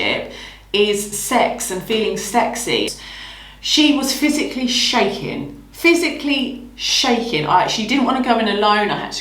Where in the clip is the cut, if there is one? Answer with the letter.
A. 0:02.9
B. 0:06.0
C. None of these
A